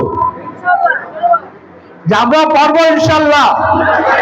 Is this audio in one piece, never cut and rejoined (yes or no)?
yes